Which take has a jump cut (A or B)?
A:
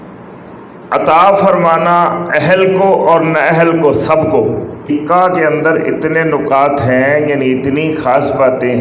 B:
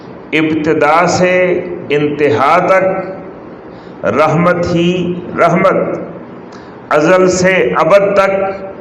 A